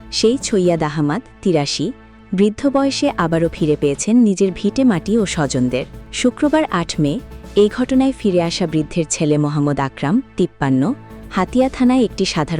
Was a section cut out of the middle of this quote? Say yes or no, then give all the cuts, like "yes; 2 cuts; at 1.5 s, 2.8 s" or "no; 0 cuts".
yes; 1 cut; at 6.0 s